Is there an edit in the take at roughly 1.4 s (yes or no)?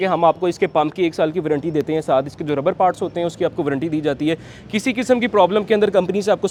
no